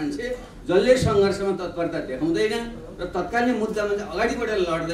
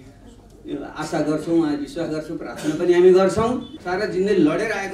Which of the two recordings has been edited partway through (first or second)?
second